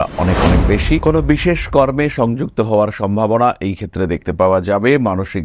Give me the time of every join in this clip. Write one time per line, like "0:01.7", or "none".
0:01.0